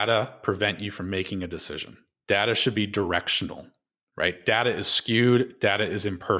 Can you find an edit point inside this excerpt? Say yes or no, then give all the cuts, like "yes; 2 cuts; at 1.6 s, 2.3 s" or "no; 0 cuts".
no; 0 cuts